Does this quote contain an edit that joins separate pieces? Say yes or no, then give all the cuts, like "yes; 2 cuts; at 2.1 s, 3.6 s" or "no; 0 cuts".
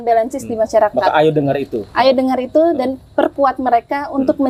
no; 0 cuts